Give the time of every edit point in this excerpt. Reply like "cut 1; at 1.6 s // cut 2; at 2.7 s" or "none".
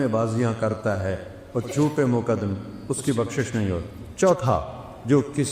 cut 1; at 4.1 s